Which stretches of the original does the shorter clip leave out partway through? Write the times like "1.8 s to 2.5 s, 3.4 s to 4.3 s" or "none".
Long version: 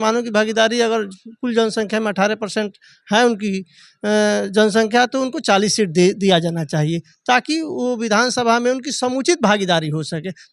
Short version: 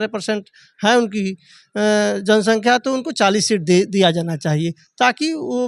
none